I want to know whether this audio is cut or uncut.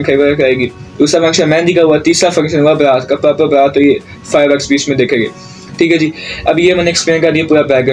uncut